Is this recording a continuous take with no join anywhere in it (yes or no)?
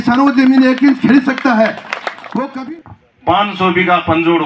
no